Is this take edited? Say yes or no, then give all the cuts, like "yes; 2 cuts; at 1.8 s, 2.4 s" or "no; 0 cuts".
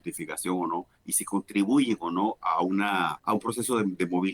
yes; 1 cut; at 3.2 s